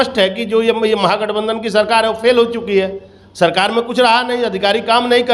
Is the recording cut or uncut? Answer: uncut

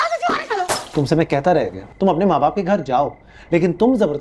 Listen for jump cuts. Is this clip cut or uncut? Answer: cut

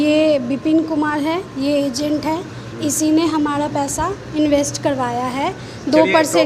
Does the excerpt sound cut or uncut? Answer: uncut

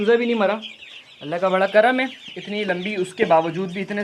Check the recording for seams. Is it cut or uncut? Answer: uncut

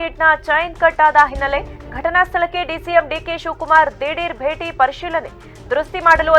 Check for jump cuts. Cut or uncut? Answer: uncut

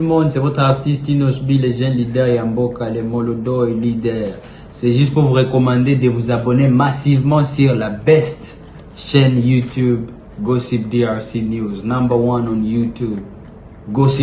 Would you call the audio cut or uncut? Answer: uncut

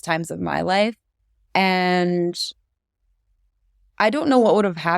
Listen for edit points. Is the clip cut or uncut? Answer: cut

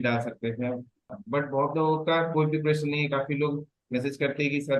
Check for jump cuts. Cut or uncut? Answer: cut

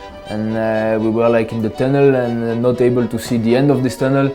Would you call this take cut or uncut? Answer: uncut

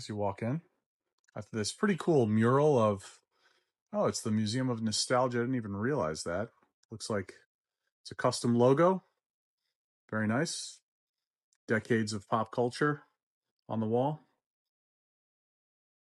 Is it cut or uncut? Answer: uncut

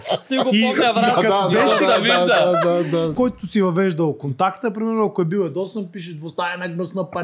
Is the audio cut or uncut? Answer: cut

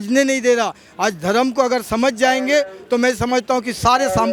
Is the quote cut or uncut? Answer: uncut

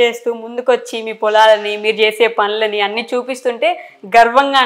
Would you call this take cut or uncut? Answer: uncut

